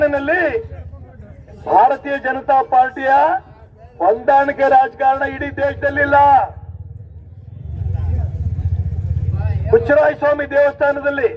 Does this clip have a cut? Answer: no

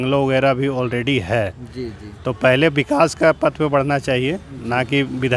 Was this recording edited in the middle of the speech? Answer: no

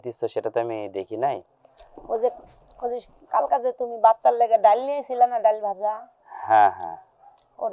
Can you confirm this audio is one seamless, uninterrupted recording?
yes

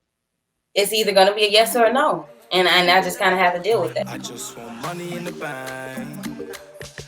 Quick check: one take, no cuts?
no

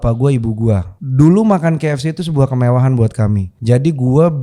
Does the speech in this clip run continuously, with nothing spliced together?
no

